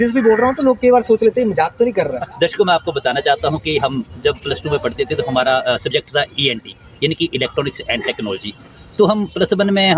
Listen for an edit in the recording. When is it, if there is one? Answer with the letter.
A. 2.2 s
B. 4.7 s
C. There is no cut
A